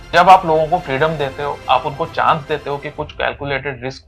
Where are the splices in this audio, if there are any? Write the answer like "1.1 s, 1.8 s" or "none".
1.6 s